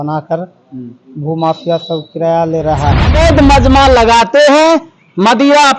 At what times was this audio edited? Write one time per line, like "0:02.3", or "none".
0:03.1